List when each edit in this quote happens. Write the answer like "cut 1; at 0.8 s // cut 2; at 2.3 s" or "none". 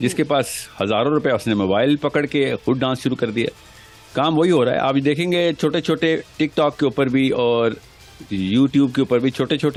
none